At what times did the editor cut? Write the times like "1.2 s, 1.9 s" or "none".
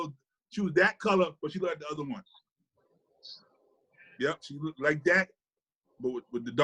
none